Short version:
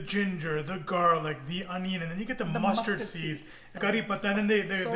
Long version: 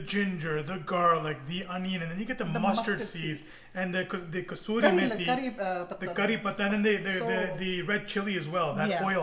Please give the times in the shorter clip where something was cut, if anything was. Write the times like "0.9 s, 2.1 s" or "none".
3.7 s